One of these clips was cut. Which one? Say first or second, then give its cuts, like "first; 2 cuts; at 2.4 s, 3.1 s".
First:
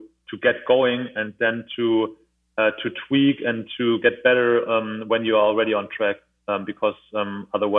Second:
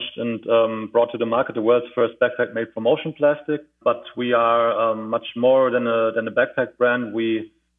second; 1 cut; at 3.7 s